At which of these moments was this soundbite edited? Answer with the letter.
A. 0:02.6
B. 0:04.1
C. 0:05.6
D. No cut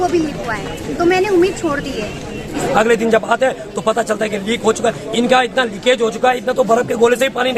A